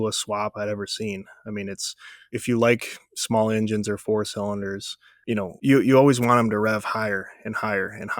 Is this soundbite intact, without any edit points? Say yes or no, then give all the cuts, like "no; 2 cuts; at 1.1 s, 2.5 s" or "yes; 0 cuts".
yes; 0 cuts